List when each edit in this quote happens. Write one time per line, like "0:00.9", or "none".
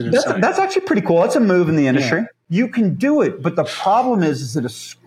0:02.4